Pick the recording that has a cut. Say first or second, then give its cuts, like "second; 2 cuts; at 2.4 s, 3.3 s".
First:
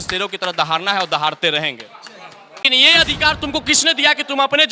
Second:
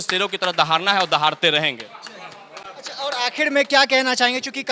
first; 1 cut; at 2.6 s